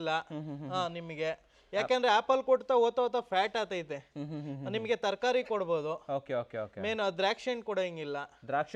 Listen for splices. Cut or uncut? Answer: uncut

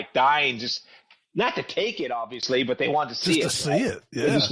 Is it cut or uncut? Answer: uncut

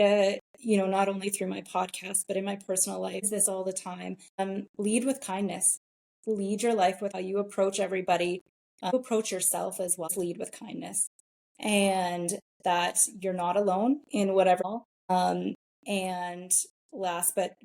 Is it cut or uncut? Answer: cut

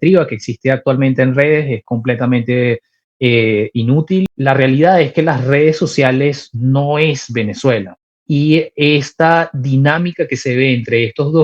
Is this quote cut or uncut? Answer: cut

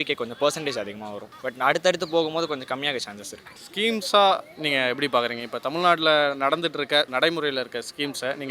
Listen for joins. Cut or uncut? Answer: uncut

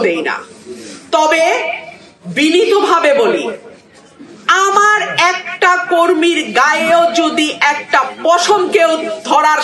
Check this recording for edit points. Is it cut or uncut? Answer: uncut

